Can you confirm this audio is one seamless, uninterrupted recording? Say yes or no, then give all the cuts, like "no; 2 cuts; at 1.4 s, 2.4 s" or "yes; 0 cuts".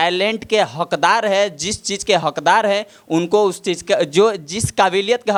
yes; 0 cuts